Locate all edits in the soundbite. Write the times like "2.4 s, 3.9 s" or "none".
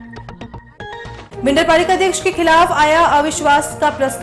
1.1 s